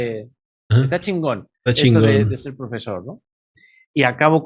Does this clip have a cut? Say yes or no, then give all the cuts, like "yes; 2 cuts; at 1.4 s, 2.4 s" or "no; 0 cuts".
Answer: no; 0 cuts